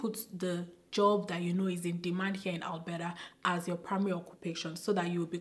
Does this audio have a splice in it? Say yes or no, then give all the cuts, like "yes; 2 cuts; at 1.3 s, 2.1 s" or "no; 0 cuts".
no; 0 cuts